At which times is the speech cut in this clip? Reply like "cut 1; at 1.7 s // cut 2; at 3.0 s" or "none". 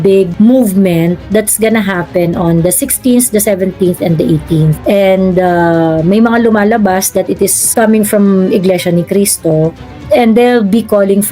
cut 1; at 7.6 s